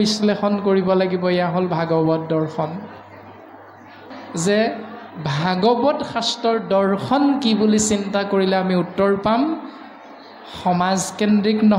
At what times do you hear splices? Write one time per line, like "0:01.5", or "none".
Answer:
0:04.1